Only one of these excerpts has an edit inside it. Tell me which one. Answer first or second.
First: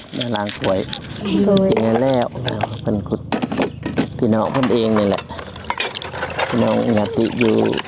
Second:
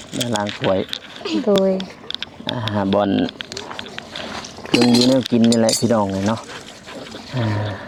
first